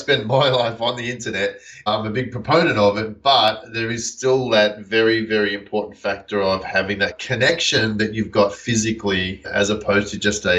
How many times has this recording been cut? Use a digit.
3